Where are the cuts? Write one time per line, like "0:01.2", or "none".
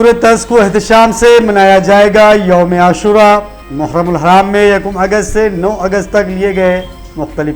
none